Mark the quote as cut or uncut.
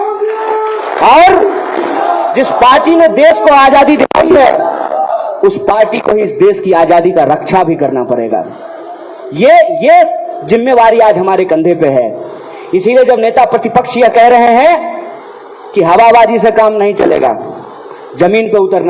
uncut